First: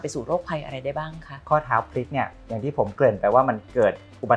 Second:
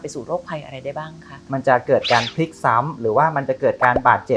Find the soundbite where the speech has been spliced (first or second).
second